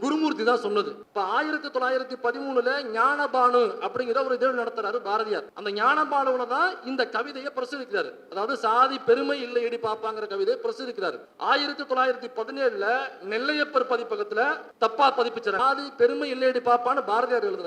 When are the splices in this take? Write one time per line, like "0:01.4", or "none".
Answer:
0:01.0
0:05.5
0:11.3
0:14.6
0:15.6